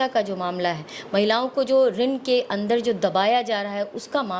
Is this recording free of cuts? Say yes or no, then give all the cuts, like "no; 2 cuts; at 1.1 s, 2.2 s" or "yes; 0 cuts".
yes; 0 cuts